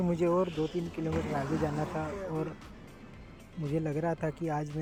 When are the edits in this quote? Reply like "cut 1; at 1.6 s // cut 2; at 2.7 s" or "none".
none